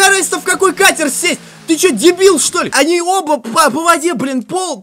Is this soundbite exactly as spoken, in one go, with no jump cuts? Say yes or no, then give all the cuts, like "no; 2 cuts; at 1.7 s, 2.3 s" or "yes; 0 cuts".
no; 1 cut; at 2.7 s